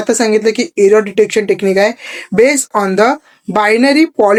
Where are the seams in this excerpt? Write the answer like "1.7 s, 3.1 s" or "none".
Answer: none